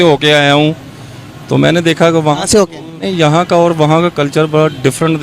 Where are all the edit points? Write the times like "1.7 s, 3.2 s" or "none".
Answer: 3.1 s